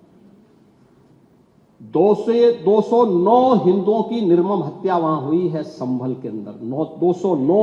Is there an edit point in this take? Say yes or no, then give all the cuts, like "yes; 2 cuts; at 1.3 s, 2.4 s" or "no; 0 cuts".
no; 0 cuts